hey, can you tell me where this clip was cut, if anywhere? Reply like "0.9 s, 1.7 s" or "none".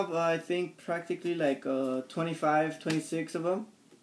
1.8 s